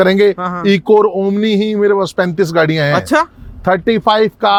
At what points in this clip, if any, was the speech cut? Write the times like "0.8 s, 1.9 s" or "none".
none